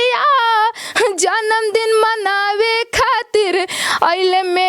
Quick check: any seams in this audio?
no; 0 cuts

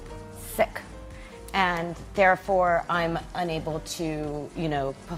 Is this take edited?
no; 0 cuts

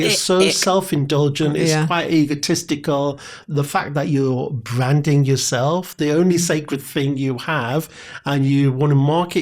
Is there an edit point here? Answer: yes; 1 cut; at 3.3 s

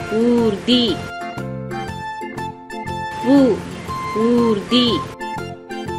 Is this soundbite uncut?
yes; 0 cuts

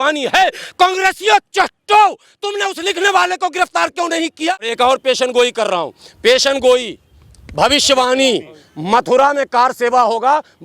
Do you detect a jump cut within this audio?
yes; 1 cut; at 4.7 s

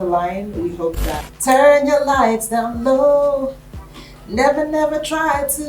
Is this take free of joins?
no; 1 cut; at 1.3 s

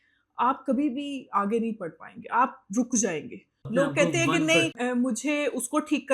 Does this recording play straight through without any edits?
no; 2 cuts; at 3.5 s, 4.8 s

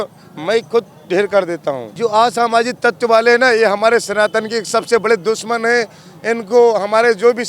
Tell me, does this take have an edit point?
yes; 1 cut; at 1.9 s

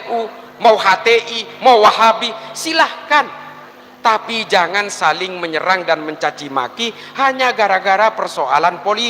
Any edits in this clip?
no; 0 cuts

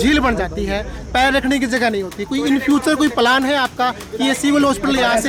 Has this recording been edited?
no; 0 cuts

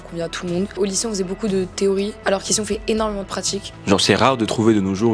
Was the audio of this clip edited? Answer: yes; 2 cuts; at 0.7 s, 3.7 s

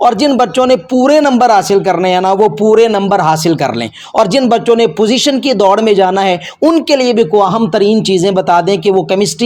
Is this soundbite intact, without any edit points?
yes; 0 cuts

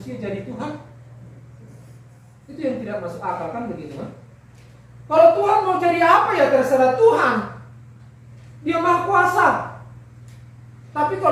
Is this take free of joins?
yes; 0 cuts

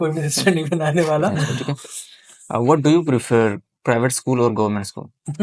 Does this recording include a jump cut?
yes; 1 cut; at 1.4 s

